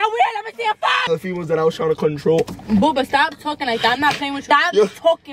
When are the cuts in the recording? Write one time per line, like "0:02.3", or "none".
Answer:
0:01.0
0:04.4